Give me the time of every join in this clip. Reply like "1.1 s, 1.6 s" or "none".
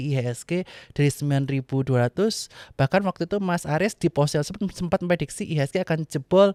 none